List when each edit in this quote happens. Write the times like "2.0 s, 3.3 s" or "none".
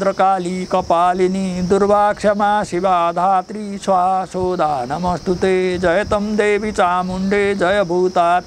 none